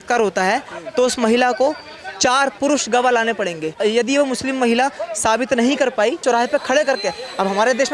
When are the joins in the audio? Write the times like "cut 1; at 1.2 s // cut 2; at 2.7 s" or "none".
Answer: cut 1; at 3.8 s // cut 2; at 6.2 s